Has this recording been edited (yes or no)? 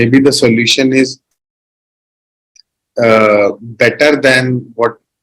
no